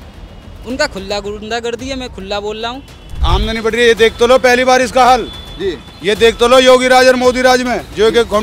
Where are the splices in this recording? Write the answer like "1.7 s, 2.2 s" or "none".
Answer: 3.2 s